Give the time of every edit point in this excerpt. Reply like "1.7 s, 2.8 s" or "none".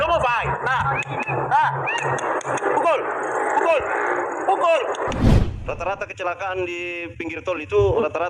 5.2 s